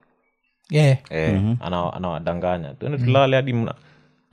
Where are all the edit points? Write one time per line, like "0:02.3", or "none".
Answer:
none